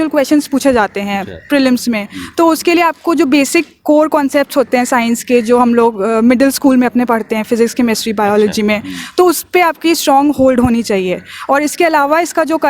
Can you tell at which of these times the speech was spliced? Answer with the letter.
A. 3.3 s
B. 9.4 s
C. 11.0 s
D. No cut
D